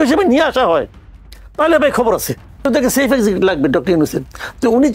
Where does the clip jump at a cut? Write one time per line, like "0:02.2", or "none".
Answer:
0:02.7